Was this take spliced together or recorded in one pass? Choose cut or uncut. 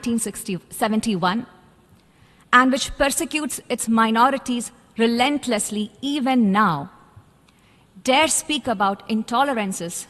uncut